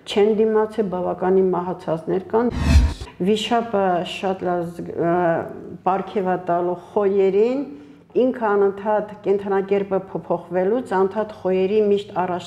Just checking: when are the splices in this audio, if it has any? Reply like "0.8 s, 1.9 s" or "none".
2.7 s